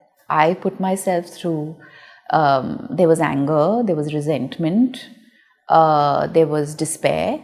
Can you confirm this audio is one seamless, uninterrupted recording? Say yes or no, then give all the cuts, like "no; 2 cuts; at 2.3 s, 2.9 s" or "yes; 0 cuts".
yes; 0 cuts